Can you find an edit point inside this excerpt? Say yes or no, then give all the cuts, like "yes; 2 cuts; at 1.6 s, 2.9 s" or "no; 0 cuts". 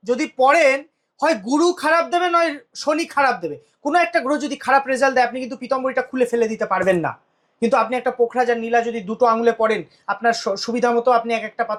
no; 0 cuts